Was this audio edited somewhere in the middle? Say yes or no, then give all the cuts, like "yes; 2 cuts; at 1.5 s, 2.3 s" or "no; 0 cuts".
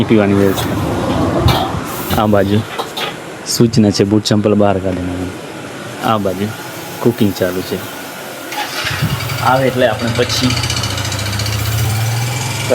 no; 0 cuts